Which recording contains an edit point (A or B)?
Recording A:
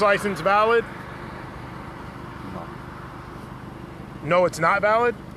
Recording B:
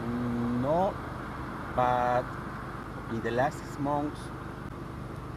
B